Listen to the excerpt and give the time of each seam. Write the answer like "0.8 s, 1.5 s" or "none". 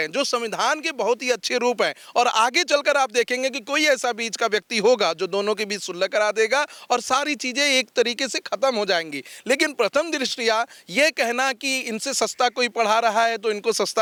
none